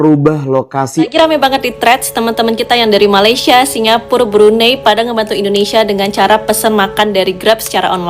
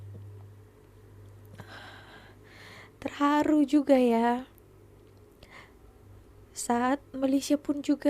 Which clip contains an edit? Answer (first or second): first